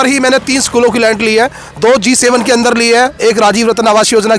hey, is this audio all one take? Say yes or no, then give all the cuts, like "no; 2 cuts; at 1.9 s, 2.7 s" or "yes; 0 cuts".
yes; 0 cuts